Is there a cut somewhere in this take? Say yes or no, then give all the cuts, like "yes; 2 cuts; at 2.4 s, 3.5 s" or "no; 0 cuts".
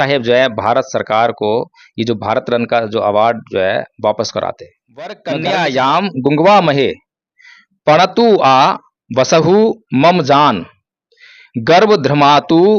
yes; 1 cut; at 5.2 s